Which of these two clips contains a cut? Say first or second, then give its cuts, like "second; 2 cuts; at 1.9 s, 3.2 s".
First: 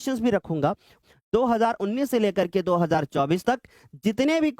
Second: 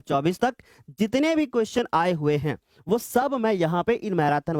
first; 1 cut; at 0.9 s